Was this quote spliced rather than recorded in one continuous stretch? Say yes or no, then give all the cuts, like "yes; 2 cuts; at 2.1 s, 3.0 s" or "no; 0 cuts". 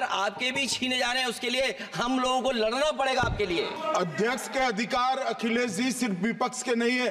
yes; 1 cut; at 3.7 s